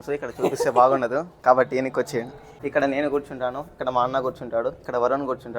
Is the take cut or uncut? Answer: cut